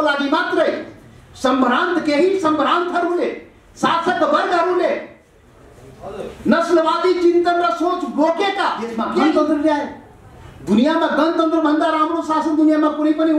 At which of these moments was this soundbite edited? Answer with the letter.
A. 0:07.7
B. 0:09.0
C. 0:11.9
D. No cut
B